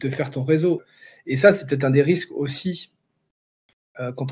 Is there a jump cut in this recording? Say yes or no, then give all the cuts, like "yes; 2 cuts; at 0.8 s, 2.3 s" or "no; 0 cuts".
yes; 1 cut; at 0.9 s